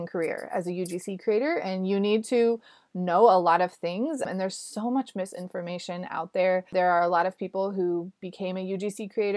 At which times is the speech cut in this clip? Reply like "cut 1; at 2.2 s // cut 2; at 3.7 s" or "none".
cut 1; at 4.2 s // cut 2; at 6.7 s